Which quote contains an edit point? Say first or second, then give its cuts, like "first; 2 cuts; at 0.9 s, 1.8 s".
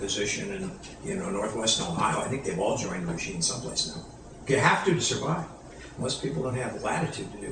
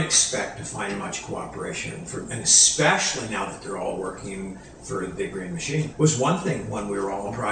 second; 1 cut; at 5.9 s